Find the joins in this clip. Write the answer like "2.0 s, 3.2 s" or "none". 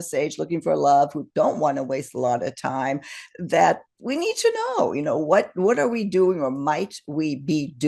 none